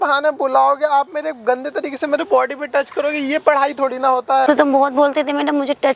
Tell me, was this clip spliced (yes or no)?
yes